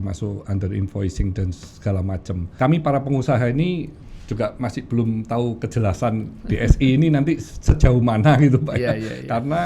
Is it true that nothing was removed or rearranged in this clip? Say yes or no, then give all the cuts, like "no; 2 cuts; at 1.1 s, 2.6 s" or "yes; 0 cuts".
no; 1 cut; at 2.5 s